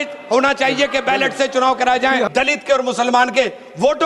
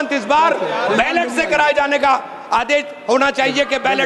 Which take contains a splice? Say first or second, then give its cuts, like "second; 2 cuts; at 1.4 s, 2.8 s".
first; 1 cut; at 2.3 s